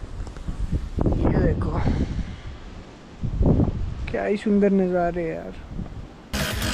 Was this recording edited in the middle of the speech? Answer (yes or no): no